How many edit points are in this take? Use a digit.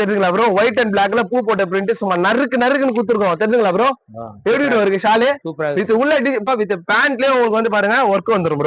1